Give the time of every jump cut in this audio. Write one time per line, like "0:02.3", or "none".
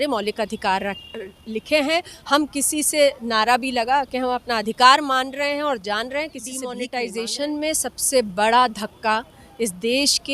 0:06.8